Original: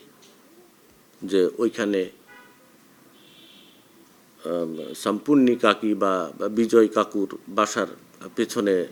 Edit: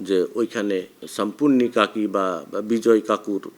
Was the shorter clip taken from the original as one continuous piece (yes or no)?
no